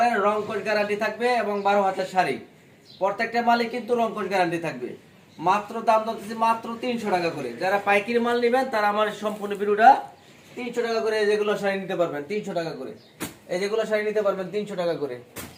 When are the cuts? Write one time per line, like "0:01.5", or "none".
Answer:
none